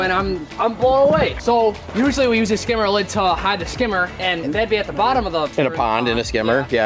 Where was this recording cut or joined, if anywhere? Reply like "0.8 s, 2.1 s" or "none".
4.4 s, 5.5 s